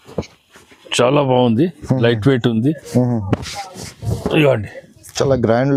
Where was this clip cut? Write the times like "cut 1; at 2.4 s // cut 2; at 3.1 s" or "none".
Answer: none

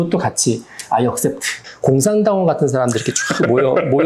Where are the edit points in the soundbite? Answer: cut 1; at 1.6 s

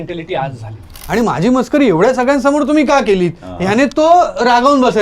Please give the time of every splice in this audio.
cut 1; at 0.9 s

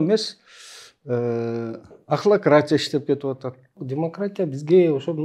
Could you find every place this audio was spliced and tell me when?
cut 1; at 3.8 s

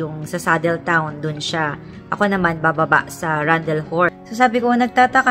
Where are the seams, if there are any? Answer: cut 1; at 4.2 s

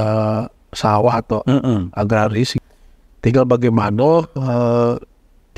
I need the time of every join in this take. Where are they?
cut 1; at 2.5 s

